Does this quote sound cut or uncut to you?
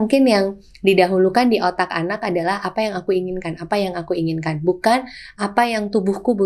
uncut